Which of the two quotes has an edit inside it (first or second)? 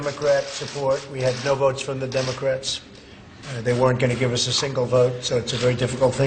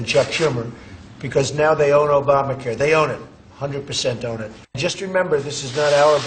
second